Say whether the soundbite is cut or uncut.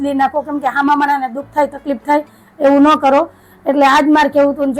uncut